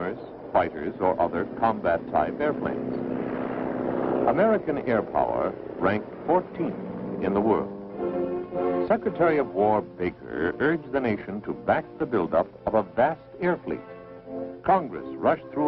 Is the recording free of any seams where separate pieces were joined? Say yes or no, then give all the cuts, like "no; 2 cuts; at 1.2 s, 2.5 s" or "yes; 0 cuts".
yes; 0 cuts